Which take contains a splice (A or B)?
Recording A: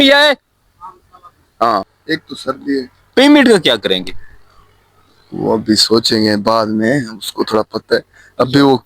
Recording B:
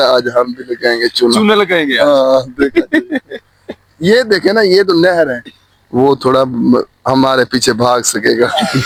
A